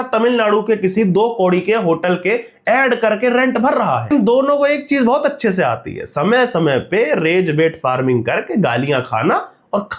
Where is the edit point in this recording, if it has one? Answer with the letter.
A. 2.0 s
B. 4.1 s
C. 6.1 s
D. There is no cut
B